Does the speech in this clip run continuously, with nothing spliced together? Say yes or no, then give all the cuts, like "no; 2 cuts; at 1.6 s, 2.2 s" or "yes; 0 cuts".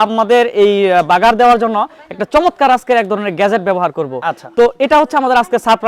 yes; 0 cuts